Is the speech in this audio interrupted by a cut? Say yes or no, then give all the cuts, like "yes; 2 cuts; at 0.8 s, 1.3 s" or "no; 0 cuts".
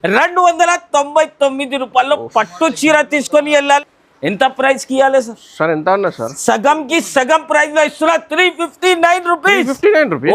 yes; 1 cut; at 3.8 s